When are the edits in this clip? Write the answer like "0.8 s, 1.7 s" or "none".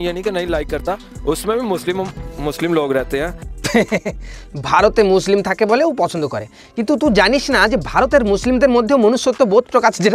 none